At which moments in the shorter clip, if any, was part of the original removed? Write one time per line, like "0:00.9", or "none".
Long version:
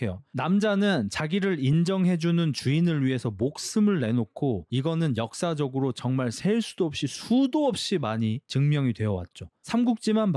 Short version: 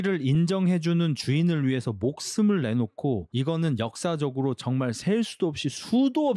none

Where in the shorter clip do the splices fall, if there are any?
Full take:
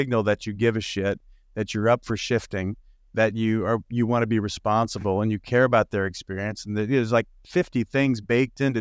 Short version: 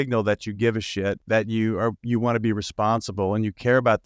0:01.2

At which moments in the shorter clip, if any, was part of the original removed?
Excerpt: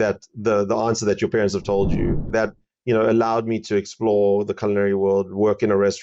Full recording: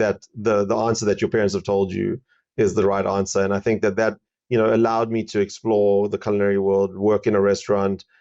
0:02.3

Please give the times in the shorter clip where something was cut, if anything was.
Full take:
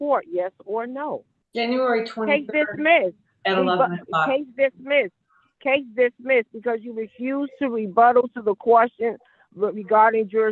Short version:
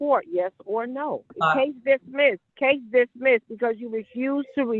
0:01.3
0:02.5

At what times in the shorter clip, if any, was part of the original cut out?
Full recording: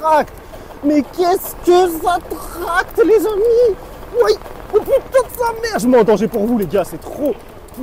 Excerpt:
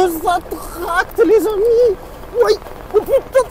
none

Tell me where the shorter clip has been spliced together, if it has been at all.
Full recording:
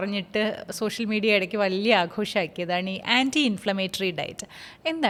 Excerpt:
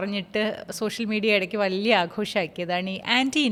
none

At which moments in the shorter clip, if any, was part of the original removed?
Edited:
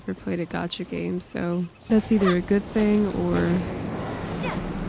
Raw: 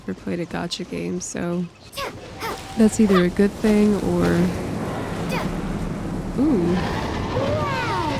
0:01.8

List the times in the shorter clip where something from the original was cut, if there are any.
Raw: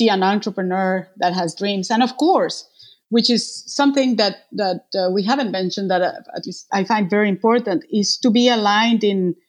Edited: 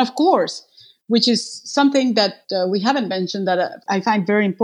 0:02.4
0:03.8

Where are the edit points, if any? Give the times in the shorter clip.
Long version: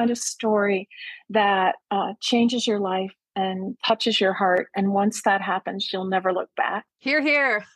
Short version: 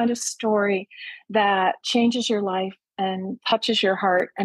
0:01.8

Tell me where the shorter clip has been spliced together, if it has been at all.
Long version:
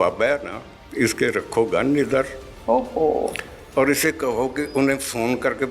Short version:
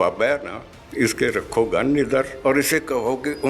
0:02.3

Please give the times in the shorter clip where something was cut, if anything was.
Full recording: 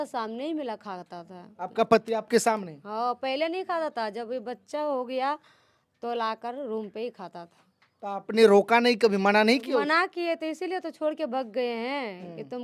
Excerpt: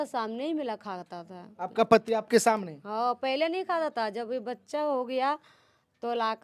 none

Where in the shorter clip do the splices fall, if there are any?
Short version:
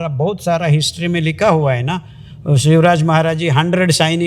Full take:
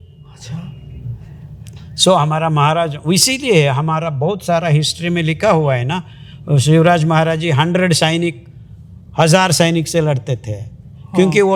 none

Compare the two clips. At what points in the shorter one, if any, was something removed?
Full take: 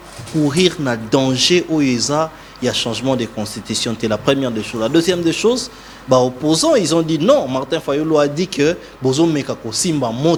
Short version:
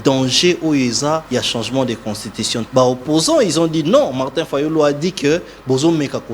0:01.2
0:02.6

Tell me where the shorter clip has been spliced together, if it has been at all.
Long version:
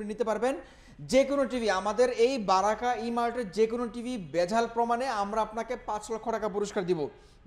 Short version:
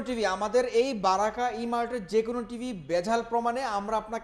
none

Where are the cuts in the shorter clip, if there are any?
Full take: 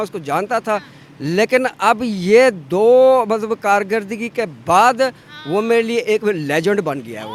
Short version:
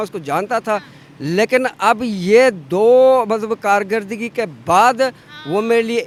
none

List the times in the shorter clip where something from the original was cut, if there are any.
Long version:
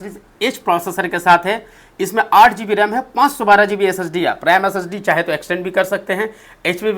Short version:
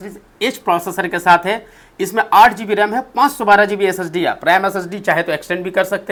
none

